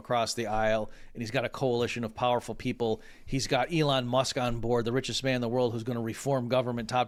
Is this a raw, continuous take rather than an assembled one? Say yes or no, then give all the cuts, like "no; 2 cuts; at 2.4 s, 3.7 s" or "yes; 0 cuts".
yes; 0 cuts